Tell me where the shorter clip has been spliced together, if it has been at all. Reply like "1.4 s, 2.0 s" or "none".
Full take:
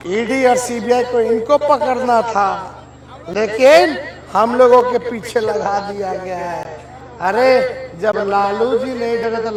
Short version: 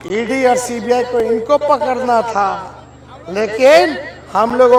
none